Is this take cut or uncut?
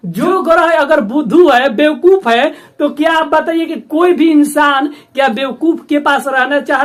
uncut